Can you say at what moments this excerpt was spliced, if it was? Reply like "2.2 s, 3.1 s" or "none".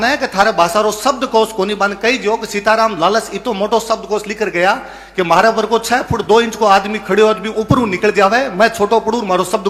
none